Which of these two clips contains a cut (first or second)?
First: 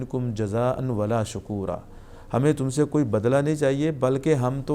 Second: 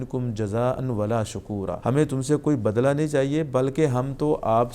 second